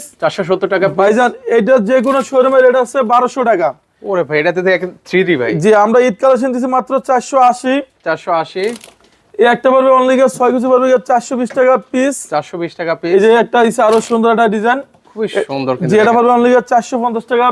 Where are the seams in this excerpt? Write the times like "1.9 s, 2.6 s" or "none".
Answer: none